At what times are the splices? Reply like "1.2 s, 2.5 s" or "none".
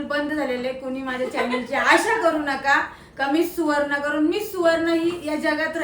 none